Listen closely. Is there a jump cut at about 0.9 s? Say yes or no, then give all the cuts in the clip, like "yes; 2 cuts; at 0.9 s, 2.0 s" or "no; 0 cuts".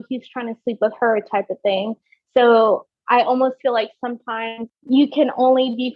no; 1 cut; at 4.7 s